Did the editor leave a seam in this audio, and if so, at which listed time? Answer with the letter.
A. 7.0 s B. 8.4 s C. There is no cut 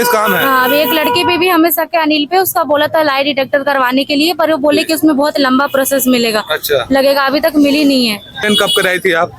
B